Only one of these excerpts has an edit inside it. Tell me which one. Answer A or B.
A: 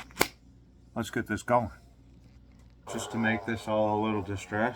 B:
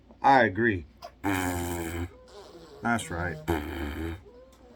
A